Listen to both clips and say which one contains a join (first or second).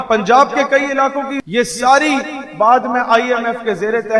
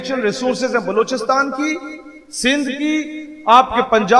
first